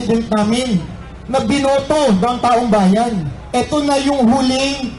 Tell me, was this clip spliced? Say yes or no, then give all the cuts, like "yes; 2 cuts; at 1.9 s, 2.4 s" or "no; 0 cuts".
yes; 1 cut; at 3.3 s